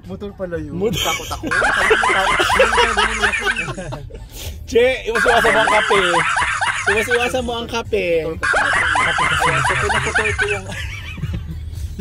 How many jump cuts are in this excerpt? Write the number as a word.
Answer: zero